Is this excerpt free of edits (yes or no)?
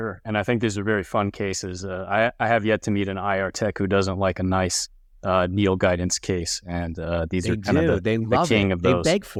yes